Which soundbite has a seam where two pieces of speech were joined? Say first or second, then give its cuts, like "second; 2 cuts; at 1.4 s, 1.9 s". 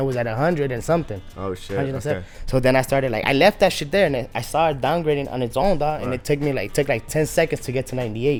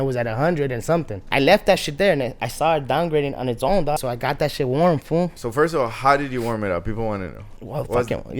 second; 3 cuts; at 1.3 s, 4.0 s, 5.3 s